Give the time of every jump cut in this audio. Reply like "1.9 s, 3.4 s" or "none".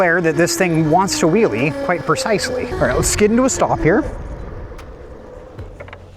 2.7 s